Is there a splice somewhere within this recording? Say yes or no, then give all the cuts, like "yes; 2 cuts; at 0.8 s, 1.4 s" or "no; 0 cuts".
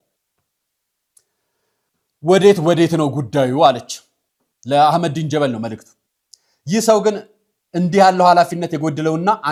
no; 0 cuts